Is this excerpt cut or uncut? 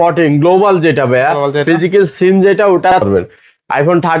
cut